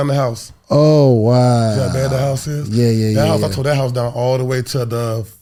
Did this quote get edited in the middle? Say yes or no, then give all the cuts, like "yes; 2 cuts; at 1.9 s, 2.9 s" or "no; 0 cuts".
no; 0 cuts